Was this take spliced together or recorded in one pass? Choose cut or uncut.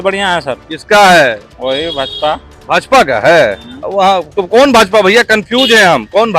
cut